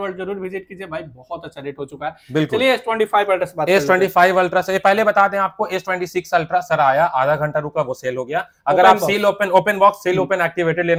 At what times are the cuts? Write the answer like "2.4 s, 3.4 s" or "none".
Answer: none